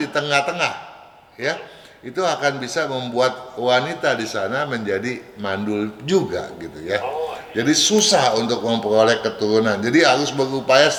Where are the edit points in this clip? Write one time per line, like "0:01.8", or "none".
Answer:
none